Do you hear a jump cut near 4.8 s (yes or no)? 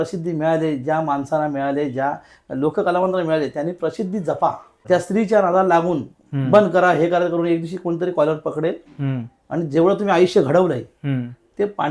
yes